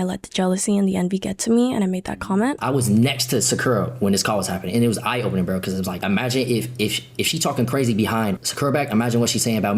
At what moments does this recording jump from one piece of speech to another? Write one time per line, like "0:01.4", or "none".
0:02.6
0:06.0
0:08.5